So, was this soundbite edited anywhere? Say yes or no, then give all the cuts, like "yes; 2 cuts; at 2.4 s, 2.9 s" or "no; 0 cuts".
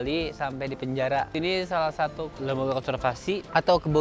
yes; 1 cut; at 1.3 s